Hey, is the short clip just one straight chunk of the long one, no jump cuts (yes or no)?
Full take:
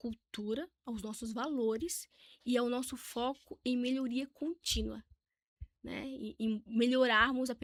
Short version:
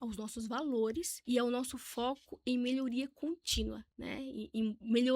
no